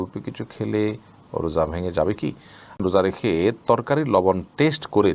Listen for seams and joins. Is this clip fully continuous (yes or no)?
no